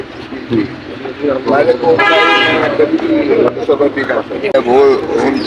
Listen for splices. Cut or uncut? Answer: cut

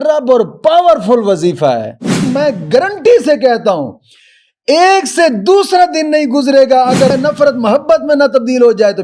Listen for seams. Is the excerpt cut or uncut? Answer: cut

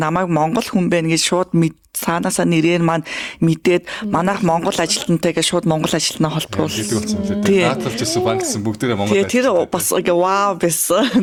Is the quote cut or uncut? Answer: uncut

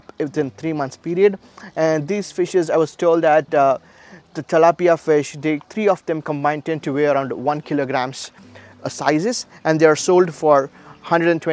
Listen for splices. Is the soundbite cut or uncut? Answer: uncut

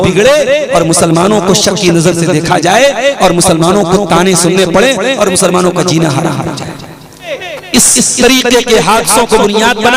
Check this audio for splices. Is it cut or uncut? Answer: cut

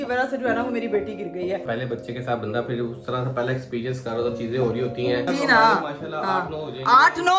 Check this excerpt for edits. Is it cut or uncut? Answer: cut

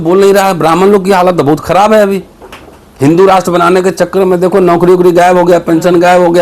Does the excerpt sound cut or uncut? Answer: uncut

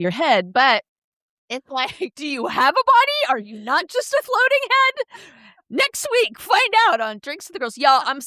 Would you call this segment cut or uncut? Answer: uncut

